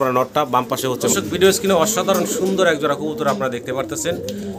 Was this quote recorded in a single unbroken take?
no; 1 cut; at 1.1 s

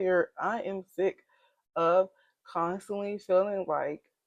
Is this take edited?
no; 0 cuts

